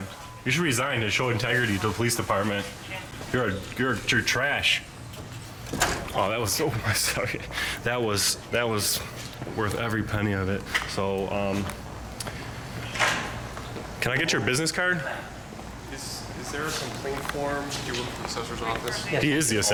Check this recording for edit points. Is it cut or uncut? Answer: uncut